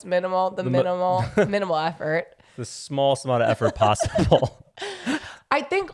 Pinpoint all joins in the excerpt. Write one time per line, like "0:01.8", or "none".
none